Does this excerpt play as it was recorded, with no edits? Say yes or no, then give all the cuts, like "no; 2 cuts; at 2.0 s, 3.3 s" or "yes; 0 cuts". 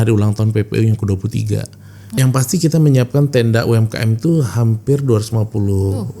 no; 1 cut; at 2.0 s